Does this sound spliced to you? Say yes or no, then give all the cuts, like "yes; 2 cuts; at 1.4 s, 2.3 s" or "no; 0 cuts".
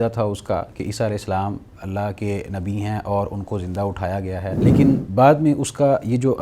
yes; 1 cut; at 4.7 s